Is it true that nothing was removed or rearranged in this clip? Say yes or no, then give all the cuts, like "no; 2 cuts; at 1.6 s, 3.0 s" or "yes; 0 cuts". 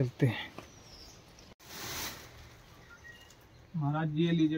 no; 1 cut; at 1.5 s